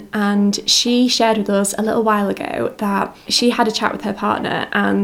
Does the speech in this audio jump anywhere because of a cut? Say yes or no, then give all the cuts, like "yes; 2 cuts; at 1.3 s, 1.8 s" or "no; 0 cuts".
yes; 1 cut; at 3.3 s